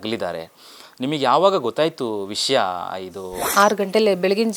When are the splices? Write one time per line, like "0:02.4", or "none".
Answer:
none